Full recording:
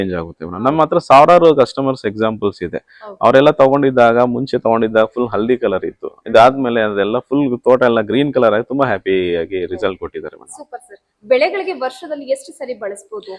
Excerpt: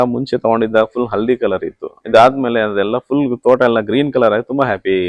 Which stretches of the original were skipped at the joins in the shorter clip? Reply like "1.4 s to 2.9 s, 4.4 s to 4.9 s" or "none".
none